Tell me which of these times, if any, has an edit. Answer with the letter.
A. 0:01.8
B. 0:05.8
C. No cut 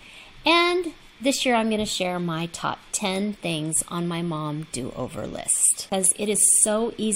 B